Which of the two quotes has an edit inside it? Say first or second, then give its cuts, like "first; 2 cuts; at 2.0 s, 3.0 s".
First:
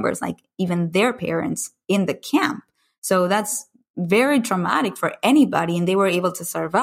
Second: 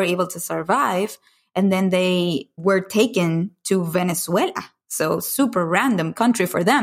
second; 1 cut; at 2.5 s